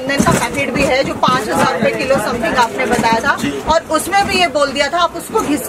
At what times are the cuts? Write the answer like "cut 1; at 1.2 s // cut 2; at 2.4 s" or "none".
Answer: none